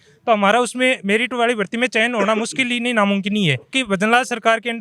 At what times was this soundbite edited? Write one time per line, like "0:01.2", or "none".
0:03.7